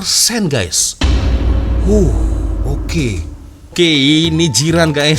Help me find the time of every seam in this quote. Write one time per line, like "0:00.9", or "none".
0:03.7